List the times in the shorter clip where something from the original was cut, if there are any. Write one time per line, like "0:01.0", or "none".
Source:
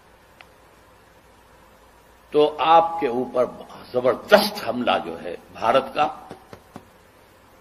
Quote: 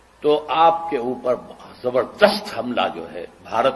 none